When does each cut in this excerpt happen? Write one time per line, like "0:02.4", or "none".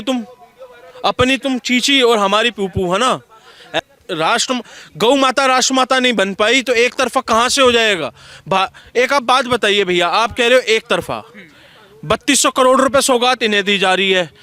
0:03.8